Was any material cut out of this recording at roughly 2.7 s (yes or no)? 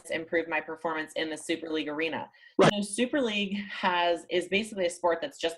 yes